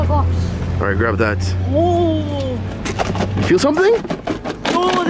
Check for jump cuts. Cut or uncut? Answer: uncut